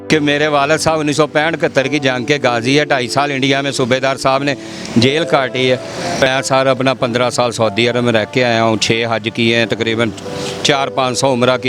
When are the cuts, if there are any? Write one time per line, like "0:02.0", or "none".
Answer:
0:06.2